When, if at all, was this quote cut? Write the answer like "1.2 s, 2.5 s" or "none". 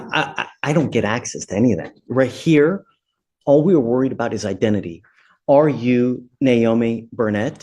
none